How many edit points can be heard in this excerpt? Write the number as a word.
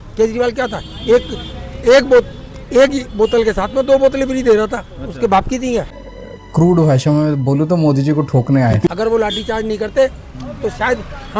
two